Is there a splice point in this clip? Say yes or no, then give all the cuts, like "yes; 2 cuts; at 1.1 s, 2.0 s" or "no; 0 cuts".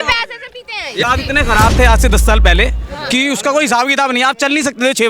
yes; 1 cut; at 1.0 s